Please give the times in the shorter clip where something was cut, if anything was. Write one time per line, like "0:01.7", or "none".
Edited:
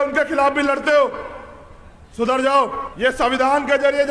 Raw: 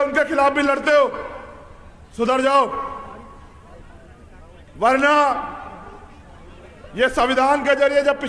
0:02.8